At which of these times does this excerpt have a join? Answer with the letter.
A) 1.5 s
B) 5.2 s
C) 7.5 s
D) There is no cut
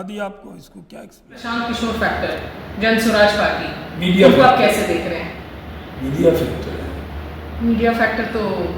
A